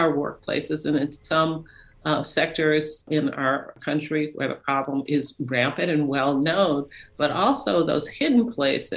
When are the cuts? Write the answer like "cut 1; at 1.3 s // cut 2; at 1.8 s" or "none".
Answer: cut 1; at 3.4 s